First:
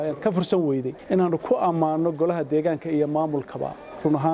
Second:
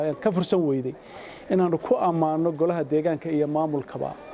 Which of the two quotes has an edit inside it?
first; 1 cut; at 0.9 s

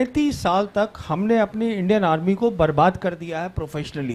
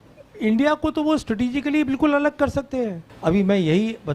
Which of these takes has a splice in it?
second; 1 cut; at 3.1 s

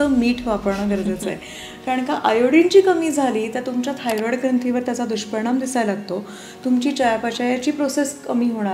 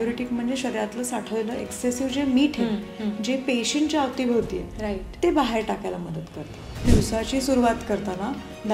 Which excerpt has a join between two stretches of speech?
second; 1 cut; at 6.8 s

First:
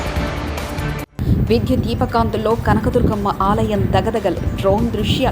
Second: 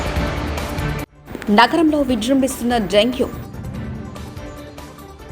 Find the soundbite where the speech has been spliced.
first; 1 cut; at 1.0 s

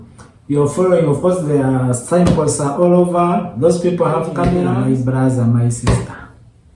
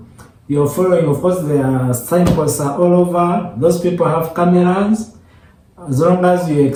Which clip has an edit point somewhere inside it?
first; 1 cut; at 4.7 s

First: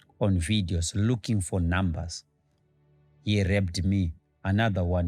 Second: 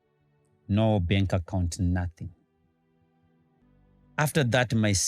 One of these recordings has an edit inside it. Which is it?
second; 1 cut; at 3.6 s

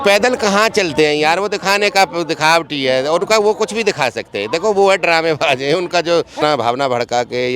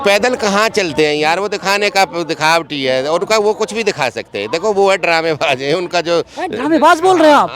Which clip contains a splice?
first; 1 cut; at 6.3 s

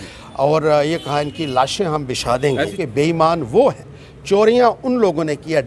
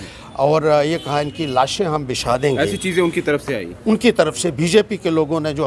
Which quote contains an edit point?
first; 1 cut; at 2.7 s

